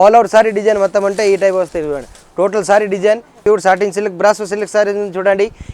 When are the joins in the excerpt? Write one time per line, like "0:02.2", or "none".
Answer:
0:03.4